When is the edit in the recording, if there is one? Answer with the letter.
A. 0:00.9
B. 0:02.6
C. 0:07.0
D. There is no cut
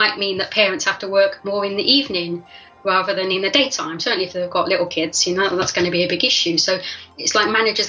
C